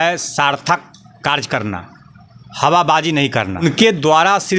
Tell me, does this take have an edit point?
yes; 1 cut; at 3.6 s

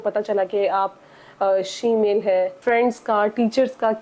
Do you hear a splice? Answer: yes; 1 cut; at 2.6 s

